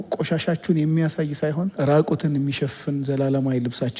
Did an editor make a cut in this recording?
yes; 1 cut; at 1.7 s

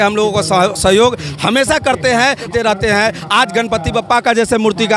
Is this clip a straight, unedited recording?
no; 1 cut; at 2.4 s

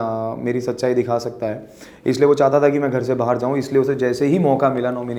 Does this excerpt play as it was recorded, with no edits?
yes; 0 cuts

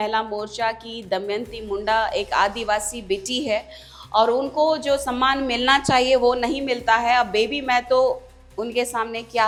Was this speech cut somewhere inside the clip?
no; 0 cuts

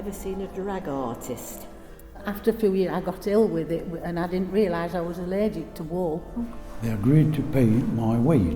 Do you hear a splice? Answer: yes; 2 cuts; at 2.2 s, 6.6 s

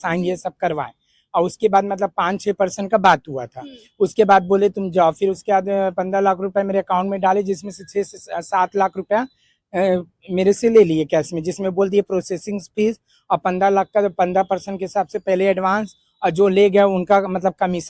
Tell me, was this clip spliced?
no; 0 cuts

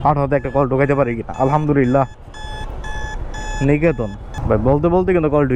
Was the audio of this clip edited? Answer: no; 0 cuts

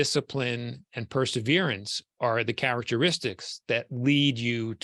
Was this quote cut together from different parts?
no; 0 cuts

